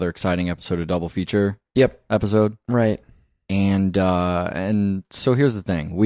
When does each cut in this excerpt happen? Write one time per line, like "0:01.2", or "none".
0:05.1